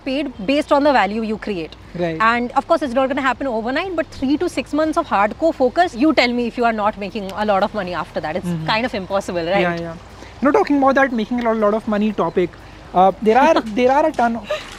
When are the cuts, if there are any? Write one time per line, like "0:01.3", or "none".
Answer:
none

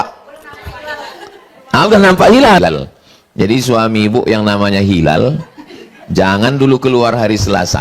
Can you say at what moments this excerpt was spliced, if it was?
0:02.6

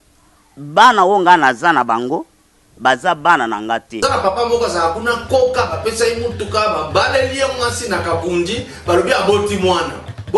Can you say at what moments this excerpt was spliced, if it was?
0:04.0

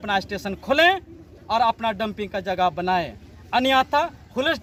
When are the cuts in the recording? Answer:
none

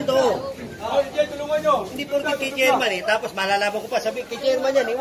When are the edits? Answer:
none

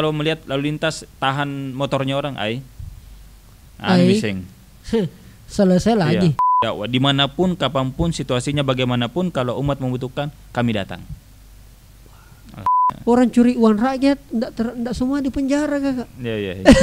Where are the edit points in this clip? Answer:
0:06.4
0:12.8

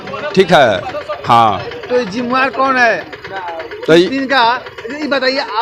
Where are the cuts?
none

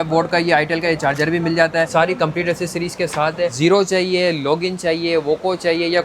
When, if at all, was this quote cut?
0:01.9
0:03.5

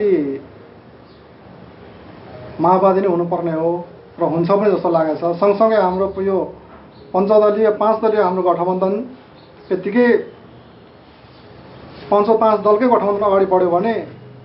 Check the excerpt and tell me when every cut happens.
none

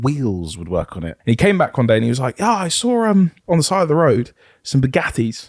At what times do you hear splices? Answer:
0:01.0
0:03.4

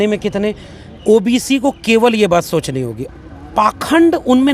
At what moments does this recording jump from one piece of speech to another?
0:03.0

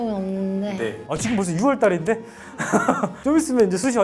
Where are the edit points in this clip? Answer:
0:01.0

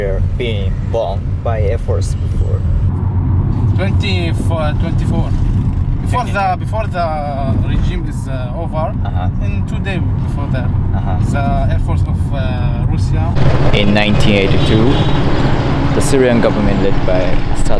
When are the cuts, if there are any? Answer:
0:13.3

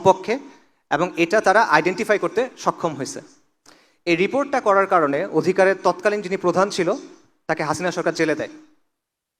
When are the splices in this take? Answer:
none

